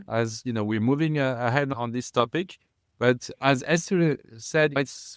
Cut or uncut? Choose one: uncut